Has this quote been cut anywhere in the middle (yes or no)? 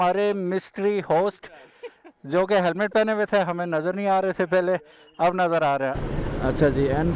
yes